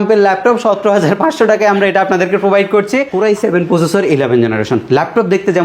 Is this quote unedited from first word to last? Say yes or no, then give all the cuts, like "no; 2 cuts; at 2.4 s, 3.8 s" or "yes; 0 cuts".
no; 1 cut; at 3.1 s